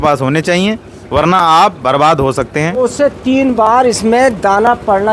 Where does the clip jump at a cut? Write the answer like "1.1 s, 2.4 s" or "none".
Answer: 2.8 s